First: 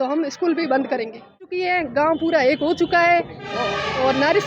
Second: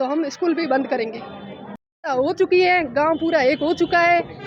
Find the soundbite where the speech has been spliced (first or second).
first